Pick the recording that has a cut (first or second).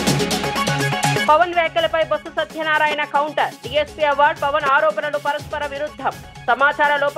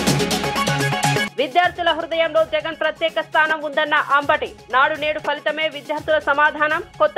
second